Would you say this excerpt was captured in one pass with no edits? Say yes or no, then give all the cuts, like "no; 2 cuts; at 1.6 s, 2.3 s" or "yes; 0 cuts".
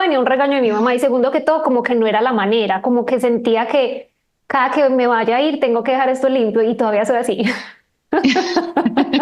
yes; 0 cuts